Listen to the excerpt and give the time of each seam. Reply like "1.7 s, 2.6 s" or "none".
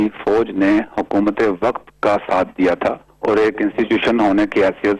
3.1 s